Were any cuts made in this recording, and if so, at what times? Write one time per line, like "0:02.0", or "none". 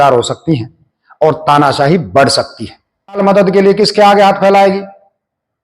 0:03.2